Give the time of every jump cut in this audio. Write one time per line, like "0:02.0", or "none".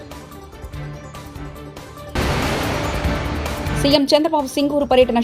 0:02.2
0:03.8